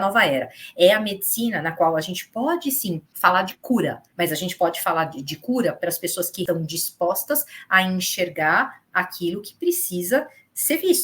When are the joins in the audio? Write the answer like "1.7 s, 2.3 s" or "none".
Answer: 3.1 s, 4.0 s, 6.4 s